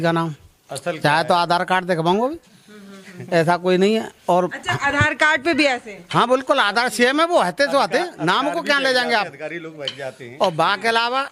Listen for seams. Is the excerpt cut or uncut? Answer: uncut